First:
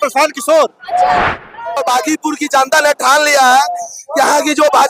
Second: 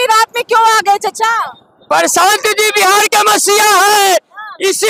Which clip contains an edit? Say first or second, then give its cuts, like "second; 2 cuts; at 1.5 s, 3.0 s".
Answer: first; 1 cut; at 1.8 s